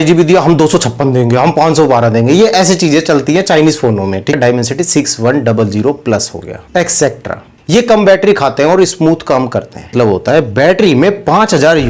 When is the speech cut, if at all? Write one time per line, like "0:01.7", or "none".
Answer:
0:04.4
0:09.9